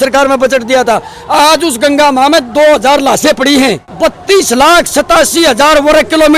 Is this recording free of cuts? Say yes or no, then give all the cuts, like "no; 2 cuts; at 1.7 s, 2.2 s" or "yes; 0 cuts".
yes; 0 cuts